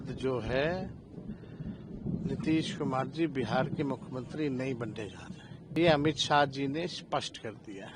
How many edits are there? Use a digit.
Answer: 1